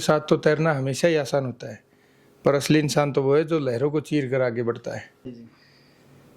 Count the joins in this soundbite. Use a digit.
1